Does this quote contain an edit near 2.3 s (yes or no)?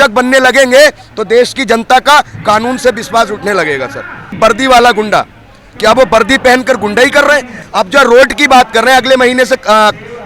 no